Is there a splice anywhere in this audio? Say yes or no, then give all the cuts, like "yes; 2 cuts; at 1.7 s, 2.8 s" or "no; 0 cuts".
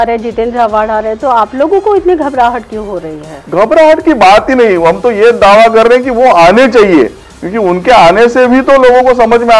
no; 0 cuts